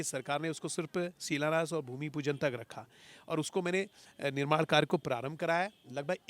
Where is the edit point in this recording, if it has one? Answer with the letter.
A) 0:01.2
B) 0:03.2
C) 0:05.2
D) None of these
D